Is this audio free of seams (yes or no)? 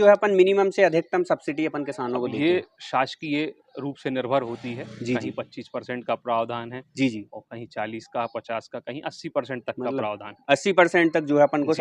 yes